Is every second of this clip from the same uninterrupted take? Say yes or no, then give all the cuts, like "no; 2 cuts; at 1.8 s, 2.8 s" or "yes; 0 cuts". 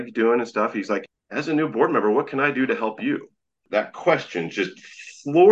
no; 1 cut; at 1.0 s